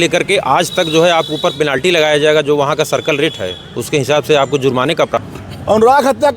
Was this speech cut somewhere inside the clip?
yes; 1 cut; at 5.2 s

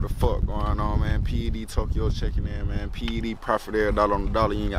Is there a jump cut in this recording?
no; 0 cuts

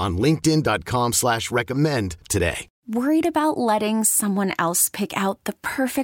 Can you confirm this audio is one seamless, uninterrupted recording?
no; 1 cut; at 2.7 s

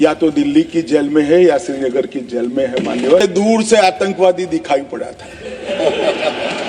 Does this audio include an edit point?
yes; 1 cut; at 3.2 s

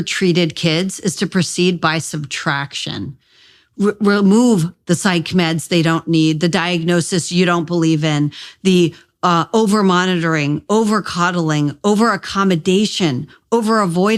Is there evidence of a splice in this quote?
no; 0 cuts

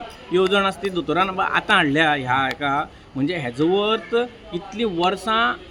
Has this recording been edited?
no; 0 cuts

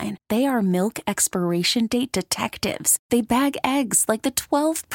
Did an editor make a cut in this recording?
no; 0 cuts

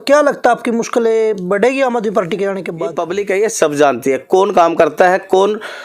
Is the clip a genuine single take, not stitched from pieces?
no; 1 cut; at 2.9 s

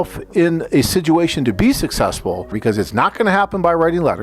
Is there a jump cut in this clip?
yes; 1 cut; at 2.5 s

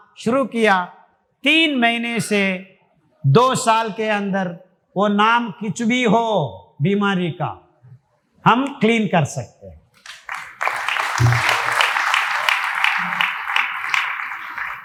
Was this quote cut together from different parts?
no; 0 cuts

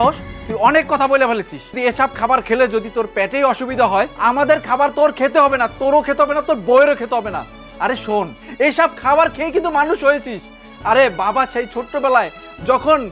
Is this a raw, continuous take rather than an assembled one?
yes; 0 cuts

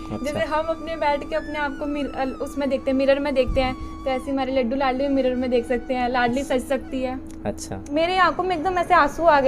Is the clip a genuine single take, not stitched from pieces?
no; 1 cut; at 7.8 s

